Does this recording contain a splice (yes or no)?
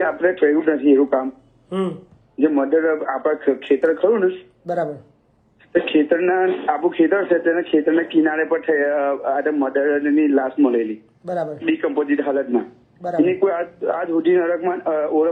no